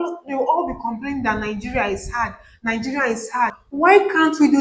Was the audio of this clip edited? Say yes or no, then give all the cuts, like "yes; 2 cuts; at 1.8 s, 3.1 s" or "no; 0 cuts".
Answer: yes; 1 cut; at 3.6 s